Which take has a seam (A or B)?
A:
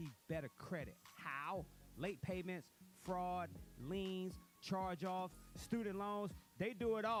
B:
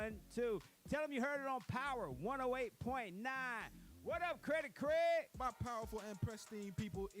B